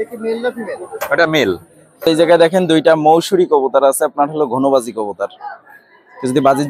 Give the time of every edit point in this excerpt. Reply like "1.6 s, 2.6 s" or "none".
2.1 s